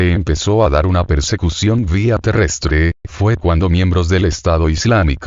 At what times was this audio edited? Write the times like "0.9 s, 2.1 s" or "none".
2.1 s